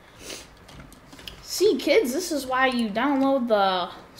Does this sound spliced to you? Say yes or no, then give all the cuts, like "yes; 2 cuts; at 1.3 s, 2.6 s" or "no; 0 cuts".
no; 0 cuts